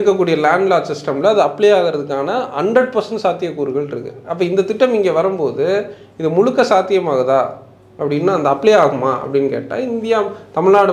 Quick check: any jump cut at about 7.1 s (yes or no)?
no